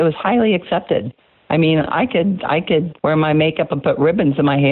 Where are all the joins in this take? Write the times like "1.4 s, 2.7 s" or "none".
2.9 s